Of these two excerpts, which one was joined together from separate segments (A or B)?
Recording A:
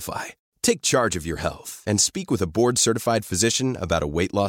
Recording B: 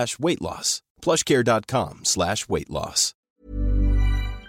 B